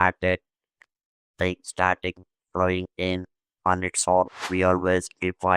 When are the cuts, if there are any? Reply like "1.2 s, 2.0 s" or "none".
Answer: 4.4 s